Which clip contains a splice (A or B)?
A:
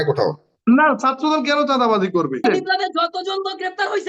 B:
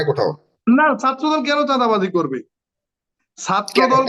A